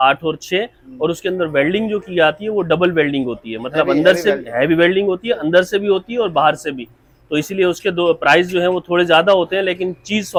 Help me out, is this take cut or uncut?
uncut